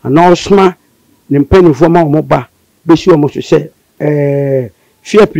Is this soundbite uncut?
no; 1 cut; at 3.8 s

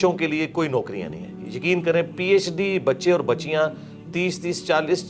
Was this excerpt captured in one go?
yes; 0 cuts

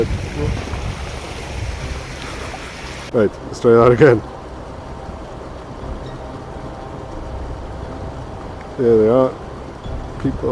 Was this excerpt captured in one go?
no; 1 cut; at 3.1 s

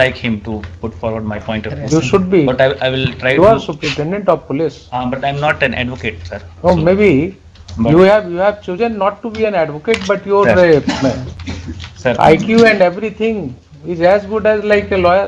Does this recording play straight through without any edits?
yes; 0 cuts

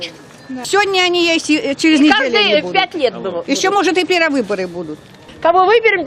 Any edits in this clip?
yes; 1 cut; at 3.0 s

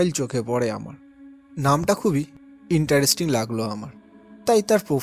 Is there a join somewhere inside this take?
no; 0 cuts

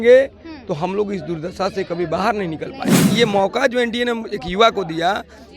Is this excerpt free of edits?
no; 1 cut; at 3.0 s

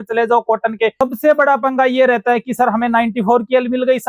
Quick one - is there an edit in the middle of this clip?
yes; 1 cut; at 0.9 s

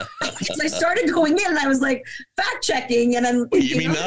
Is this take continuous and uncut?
yes; 0 cuts

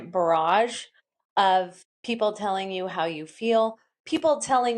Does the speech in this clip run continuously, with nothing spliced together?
no; 1 cut; at 1.9 s

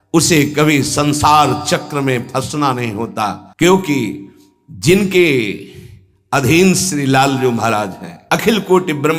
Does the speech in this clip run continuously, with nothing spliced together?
yes; 0 cuts

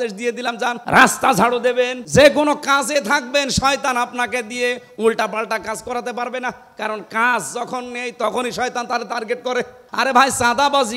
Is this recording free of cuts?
no; 3 cuts; at 0.8 s, 2.0 s, 9.8 s

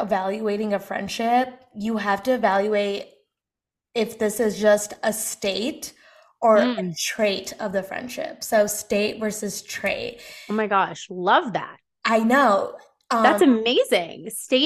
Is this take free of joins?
yes; 0 cuts

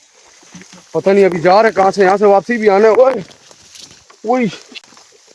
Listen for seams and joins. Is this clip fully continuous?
yes; 0 cuts

